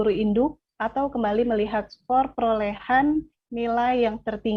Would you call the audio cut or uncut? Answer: uncut